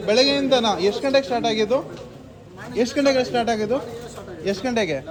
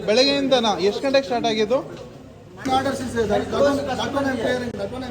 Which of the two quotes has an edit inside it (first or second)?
second